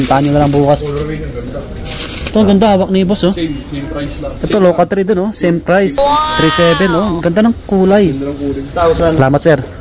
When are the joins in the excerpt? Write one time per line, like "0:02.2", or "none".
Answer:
0:04.3
0:08.6